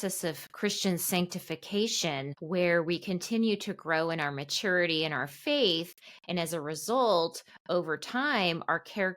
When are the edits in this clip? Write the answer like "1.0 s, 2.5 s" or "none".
2.3 s